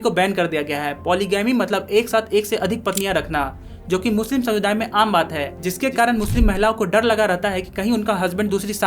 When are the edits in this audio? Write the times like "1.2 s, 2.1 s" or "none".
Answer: none